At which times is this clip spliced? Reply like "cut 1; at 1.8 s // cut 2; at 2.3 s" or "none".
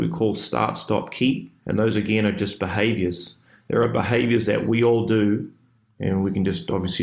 cut 1; at 1.5 s